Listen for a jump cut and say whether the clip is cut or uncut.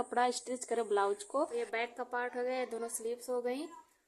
cut